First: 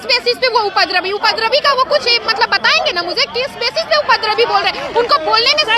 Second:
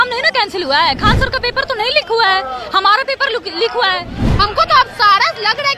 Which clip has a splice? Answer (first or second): second